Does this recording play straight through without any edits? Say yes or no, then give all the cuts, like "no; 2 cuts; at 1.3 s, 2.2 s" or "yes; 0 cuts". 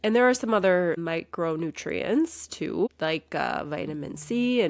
no; 2 cuts; at 1.0 s, 2.9 s